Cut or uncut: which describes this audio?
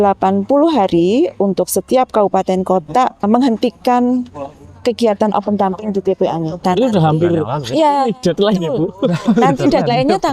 cut